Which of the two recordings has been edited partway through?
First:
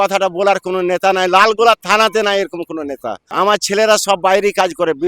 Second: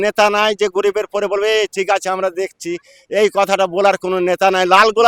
first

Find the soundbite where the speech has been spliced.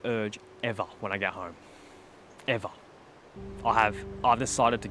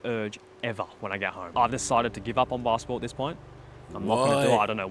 second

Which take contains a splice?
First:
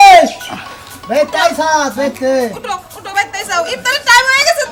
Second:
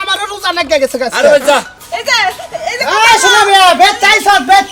second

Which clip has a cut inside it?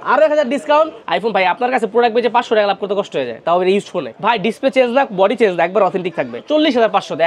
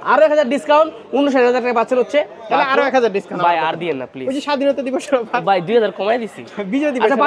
first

